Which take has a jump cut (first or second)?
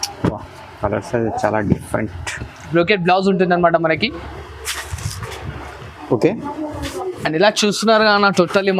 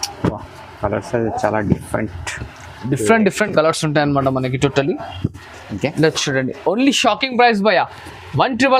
first